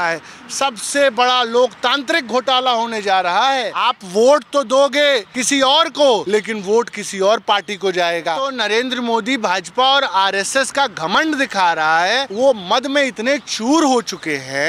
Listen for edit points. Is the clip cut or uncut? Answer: cut